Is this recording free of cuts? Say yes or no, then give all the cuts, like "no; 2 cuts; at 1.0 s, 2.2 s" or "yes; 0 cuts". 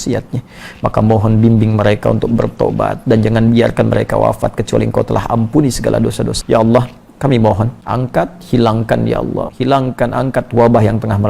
no; 3 cuts; at 6.4 s, 7.8 s, 9.5 s